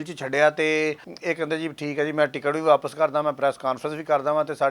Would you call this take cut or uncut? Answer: cut